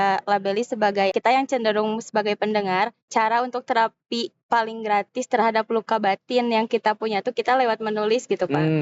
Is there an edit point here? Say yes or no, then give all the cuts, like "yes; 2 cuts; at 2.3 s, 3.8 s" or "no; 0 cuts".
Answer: yes; 2 cuts; at 1.1 s, 3.1 s